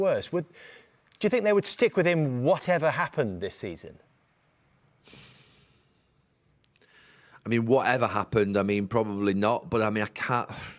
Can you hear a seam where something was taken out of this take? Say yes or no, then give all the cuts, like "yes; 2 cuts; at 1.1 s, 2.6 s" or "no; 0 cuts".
no; 0 cuts